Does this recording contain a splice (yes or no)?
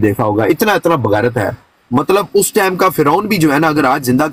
no